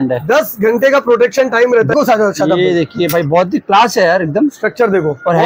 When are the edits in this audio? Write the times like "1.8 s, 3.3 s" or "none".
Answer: 1.9 s